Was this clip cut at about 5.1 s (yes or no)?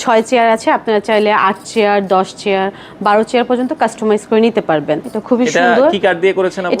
yes